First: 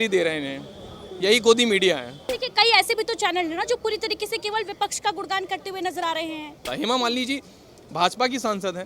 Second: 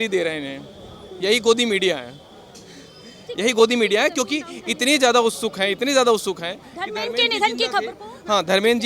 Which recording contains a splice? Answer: first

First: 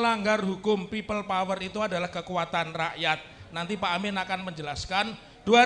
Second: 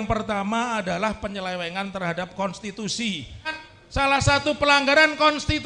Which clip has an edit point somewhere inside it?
second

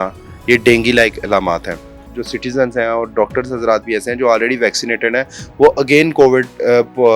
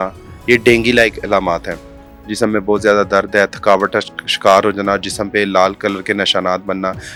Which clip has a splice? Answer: first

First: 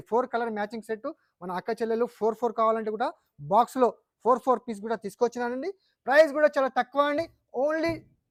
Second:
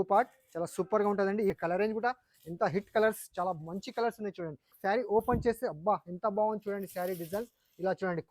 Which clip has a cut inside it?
second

